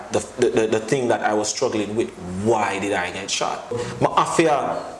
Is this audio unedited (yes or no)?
no